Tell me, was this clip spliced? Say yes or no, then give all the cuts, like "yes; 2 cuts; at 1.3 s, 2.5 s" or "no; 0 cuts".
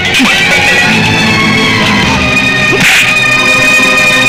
no; 0 cuts